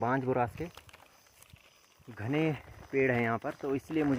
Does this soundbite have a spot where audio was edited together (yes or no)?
no